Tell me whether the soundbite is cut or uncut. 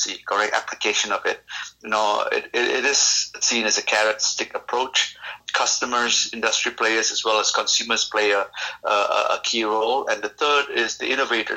cut